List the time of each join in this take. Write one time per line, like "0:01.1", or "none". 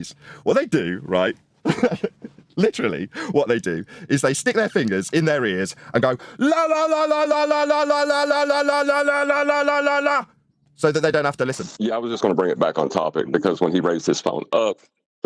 0:11.6